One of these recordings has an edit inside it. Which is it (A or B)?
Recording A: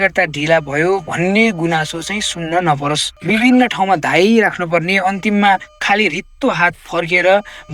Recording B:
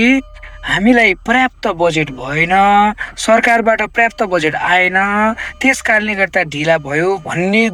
A